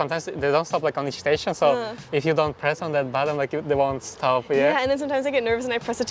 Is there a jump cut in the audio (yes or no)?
no